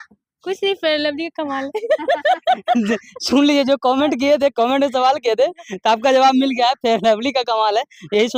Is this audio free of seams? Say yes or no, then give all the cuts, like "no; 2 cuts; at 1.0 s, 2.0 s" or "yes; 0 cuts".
yes; 0 cuts